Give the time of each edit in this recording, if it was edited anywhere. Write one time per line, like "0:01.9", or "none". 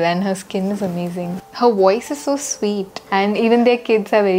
0:01.3
0:03.0